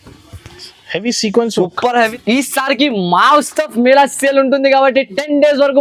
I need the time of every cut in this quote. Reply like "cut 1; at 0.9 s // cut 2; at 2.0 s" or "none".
cut 1; at 2.1 s